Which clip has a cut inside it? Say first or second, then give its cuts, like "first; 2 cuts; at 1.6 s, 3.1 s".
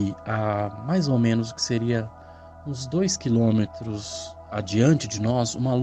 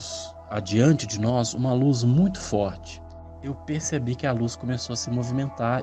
second; 1 cut; at 2.8 s